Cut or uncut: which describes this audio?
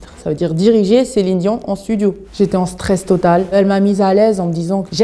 cut